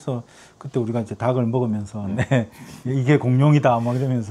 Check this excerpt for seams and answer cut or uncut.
uncut